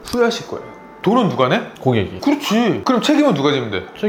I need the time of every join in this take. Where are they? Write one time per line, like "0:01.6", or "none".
none